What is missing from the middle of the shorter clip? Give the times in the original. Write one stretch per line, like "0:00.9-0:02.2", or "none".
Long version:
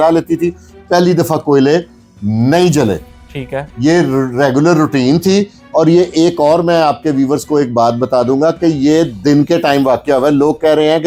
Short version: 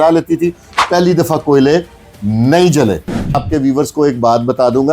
0:03.4-0:07.0